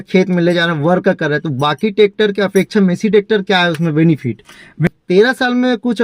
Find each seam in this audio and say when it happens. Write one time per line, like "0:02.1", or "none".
0:04.9